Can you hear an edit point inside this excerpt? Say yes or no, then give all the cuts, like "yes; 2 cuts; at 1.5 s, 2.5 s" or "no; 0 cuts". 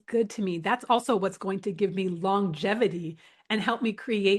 no; 0 cuts